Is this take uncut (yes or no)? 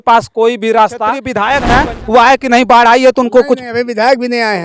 no